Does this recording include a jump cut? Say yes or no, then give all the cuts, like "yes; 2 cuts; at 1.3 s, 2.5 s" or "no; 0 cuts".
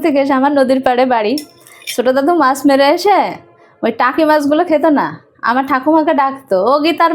no; 0 cuts